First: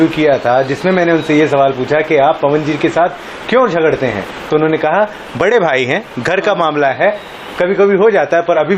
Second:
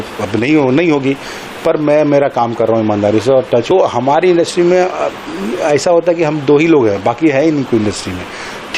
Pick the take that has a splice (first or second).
second